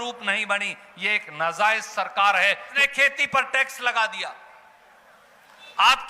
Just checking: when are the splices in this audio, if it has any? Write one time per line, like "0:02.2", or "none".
0:02.7